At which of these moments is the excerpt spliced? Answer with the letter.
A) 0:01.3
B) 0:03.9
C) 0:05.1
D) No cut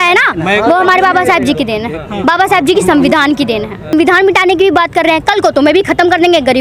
B